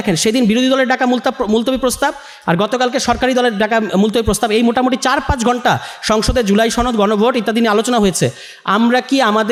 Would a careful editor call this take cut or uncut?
uncut